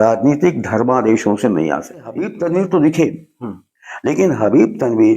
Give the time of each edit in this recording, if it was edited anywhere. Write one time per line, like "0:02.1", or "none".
0:02.2